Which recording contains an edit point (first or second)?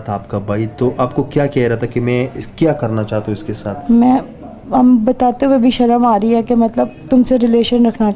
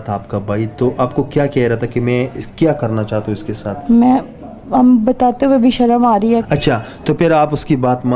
second